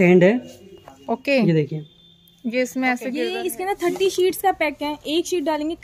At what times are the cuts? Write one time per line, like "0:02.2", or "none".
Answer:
0:03.3